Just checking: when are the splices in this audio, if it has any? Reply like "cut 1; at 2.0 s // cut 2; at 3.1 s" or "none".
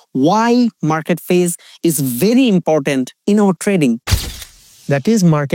cut 1; at 4.5 s